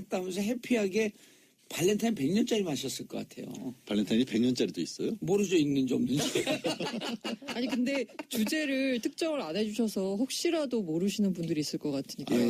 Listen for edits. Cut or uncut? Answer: cut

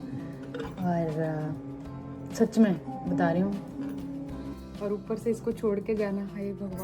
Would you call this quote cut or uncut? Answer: cut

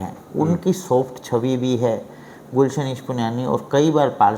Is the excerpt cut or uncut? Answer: uncut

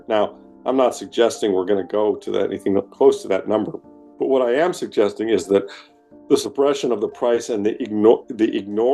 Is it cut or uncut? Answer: uncut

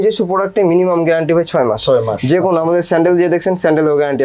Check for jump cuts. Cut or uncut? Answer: uncut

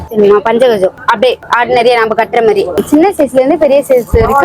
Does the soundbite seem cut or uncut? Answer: cut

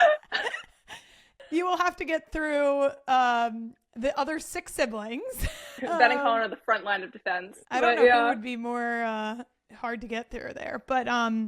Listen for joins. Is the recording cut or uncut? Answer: cut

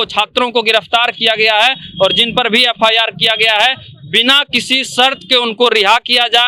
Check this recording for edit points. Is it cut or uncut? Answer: uncut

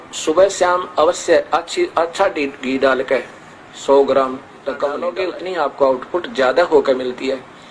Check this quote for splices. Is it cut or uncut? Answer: cut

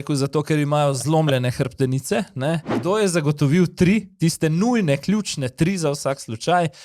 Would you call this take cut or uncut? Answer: cut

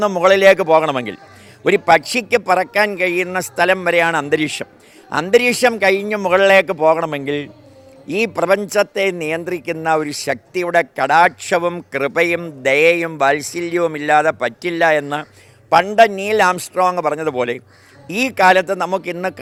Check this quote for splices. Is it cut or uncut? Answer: uncut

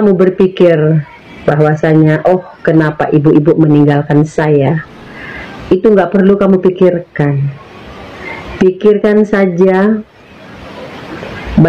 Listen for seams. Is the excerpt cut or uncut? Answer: uncut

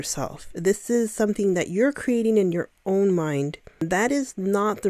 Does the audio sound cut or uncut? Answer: cut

